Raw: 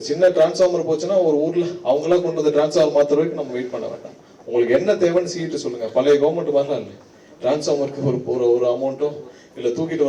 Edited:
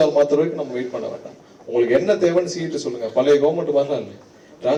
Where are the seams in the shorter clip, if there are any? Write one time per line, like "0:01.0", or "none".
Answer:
none